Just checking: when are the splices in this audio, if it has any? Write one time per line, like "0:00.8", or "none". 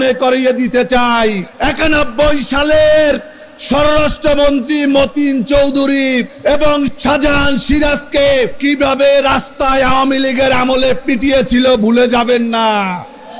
0:01.5
0:06.6
0:08.5